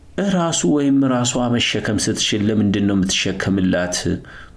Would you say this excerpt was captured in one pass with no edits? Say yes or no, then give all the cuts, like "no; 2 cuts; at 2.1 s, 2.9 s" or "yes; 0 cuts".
yes; 0 cuts